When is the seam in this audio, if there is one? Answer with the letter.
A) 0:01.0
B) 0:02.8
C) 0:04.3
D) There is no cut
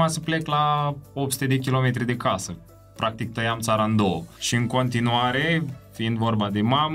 C